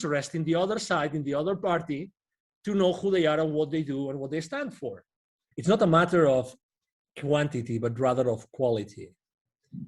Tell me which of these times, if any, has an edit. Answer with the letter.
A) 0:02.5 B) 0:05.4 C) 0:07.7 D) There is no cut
B